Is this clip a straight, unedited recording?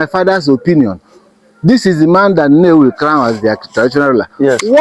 yes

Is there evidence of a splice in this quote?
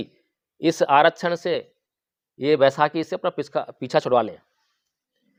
no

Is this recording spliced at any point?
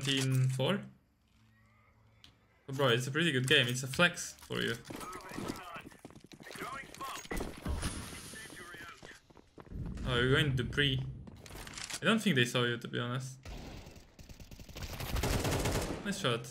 no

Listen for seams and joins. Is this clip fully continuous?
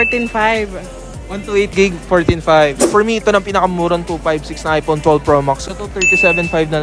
no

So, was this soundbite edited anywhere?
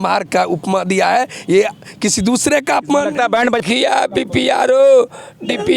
yes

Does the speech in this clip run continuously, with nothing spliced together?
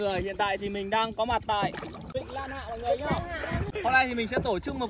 no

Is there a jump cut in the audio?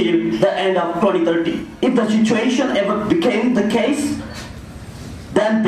yes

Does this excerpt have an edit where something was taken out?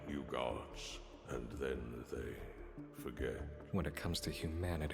yes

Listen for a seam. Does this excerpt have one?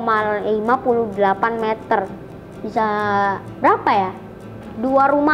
no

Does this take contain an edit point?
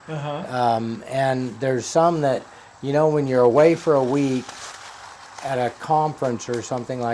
no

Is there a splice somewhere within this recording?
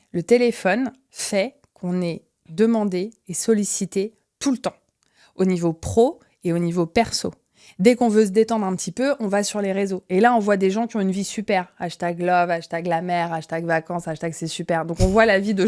no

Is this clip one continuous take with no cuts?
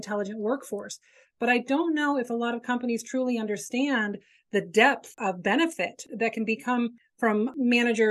no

